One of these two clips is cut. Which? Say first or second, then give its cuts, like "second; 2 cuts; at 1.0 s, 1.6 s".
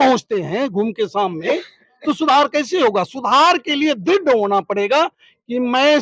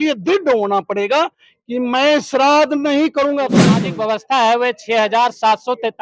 second; 1 cut; at 3.5 s